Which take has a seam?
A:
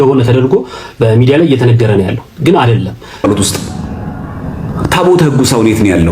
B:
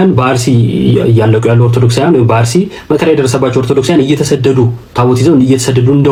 A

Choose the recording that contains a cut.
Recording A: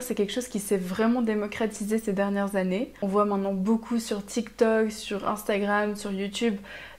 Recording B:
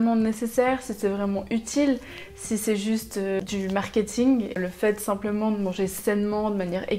B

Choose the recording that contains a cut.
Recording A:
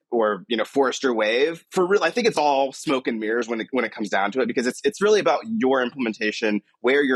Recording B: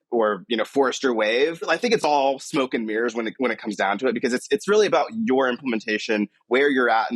B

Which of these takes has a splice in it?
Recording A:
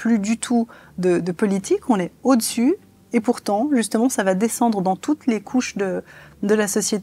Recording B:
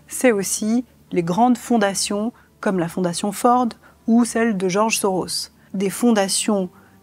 B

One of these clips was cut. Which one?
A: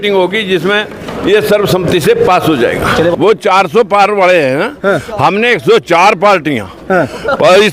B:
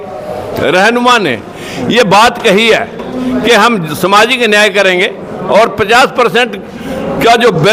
A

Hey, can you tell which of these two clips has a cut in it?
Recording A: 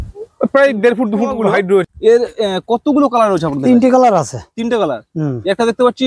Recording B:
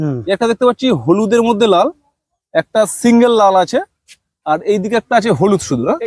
A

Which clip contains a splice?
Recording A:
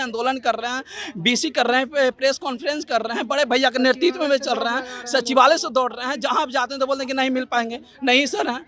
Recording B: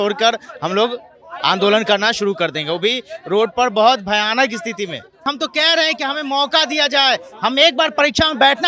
B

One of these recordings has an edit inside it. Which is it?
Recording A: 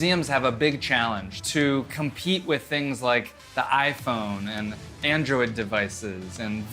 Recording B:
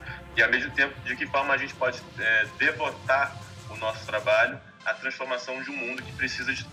A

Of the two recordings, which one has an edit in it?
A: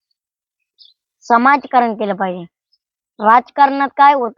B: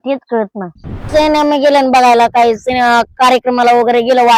B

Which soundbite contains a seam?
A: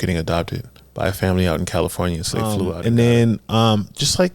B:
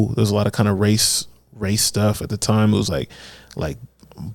A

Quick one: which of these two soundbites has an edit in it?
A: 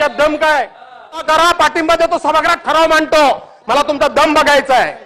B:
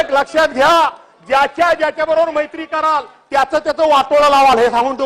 A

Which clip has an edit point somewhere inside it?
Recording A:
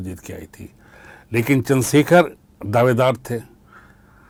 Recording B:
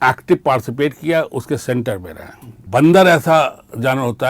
B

